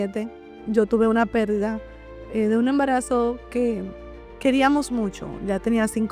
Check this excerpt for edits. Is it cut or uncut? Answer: uncut